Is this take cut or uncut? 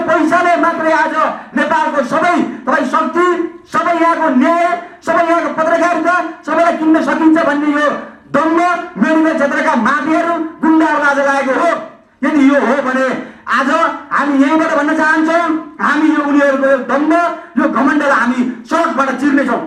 uncut